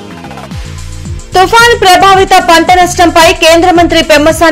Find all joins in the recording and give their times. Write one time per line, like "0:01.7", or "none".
0:01.1